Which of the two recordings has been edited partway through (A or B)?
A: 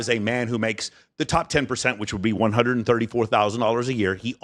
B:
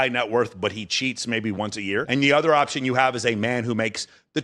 B